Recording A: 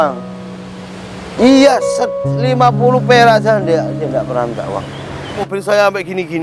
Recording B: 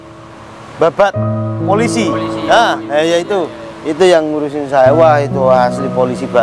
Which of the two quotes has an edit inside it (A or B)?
A